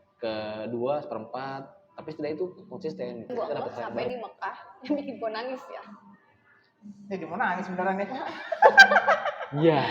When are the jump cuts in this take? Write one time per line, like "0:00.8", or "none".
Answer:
0:04.1